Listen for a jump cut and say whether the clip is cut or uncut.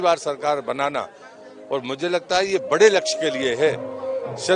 uncut